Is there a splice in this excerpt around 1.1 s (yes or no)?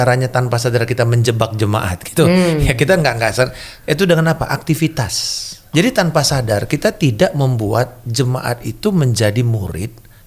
no